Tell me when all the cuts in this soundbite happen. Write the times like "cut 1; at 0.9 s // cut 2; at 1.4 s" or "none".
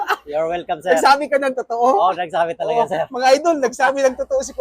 cut 1; at 3.4 s